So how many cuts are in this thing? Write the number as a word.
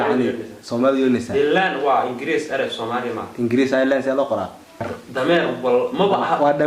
one